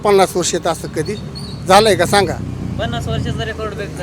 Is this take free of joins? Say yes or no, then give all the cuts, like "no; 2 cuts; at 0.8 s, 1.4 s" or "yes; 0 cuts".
yes; 0 cuts